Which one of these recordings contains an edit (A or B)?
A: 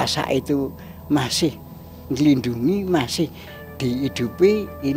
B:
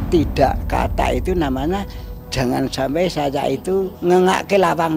B